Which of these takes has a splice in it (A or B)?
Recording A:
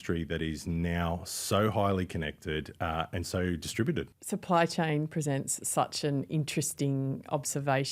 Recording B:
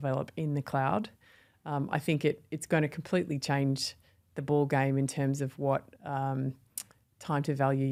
A